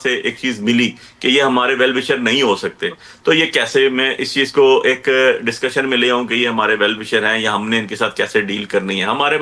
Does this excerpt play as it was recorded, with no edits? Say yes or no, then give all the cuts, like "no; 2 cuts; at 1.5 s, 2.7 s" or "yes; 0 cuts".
yes; 0 cuts